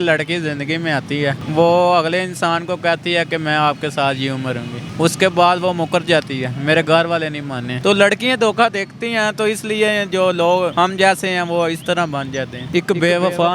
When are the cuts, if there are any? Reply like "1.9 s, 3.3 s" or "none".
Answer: 1.4 s, 4.8 s, 7.6 s, 10.7 s, 12.6 s